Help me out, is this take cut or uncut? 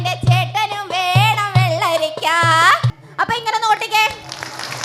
cut